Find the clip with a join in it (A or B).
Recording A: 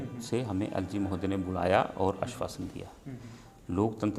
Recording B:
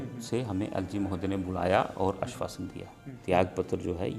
B